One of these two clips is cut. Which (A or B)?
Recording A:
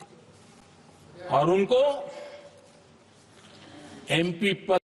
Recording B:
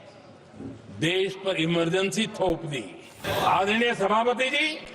B